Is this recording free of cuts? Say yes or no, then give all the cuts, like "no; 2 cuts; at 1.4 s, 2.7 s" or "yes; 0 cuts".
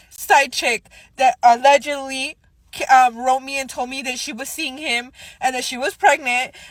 yes; 0 cuts